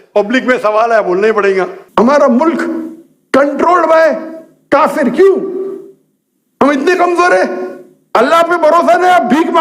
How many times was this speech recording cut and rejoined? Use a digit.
1